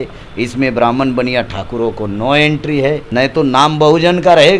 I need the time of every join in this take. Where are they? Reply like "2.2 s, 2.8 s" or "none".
none